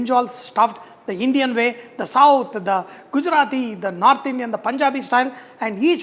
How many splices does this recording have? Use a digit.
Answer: 0